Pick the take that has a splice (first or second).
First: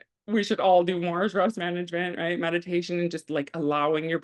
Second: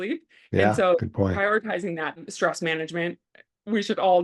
second